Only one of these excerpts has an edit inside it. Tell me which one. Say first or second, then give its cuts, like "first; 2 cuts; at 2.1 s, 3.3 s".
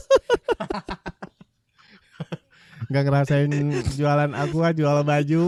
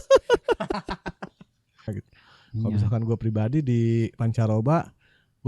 second; 1 cut; at 1.9 s